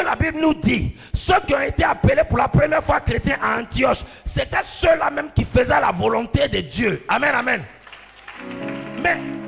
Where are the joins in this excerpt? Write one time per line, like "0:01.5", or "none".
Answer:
none